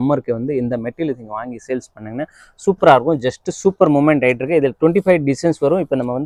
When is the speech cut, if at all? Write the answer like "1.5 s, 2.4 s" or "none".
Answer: none